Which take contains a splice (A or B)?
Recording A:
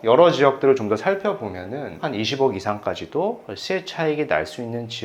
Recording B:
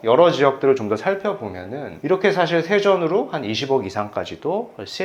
A